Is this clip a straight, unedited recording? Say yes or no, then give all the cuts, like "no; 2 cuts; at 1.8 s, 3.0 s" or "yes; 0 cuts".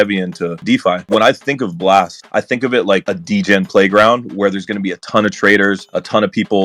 yes; 0 cuts